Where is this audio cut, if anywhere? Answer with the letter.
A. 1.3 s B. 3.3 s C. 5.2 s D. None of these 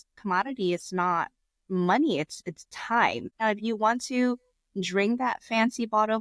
B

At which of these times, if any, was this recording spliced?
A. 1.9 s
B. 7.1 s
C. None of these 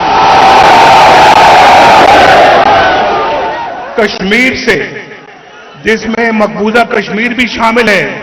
C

